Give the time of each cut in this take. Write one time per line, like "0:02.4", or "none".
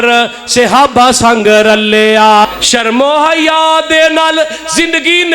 0:02.4